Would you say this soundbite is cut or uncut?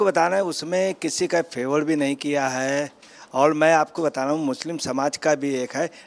uncut